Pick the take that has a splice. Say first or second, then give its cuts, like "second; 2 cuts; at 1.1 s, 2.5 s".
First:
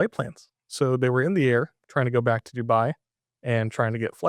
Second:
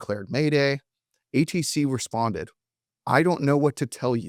first; 1 cut; at 1.8 s